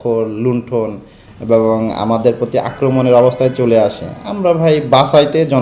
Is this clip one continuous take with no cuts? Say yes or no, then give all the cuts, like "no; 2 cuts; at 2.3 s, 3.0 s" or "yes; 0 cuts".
yes; 0 cuts